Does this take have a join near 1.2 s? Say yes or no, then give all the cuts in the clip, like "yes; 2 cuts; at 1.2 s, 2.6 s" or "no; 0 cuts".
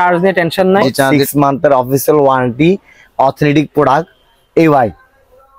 yes; 1 cut; at 1.2 s